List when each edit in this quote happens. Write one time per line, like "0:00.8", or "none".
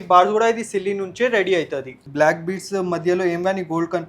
0:02.1